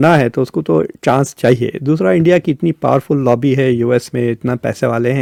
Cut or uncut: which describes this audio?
uncut